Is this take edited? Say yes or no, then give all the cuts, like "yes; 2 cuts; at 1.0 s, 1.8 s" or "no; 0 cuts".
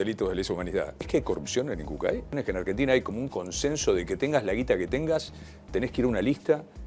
yes; 2 cuts; at 1.0 s, 2.4 s